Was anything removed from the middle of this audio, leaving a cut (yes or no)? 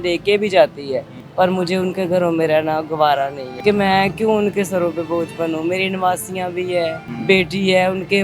yes